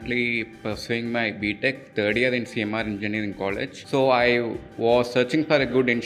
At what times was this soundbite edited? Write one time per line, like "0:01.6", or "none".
none